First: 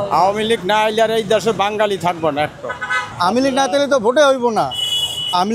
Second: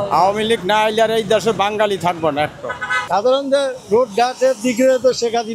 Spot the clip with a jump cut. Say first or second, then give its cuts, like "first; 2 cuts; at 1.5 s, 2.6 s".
second; 1 cut; at 2.9 s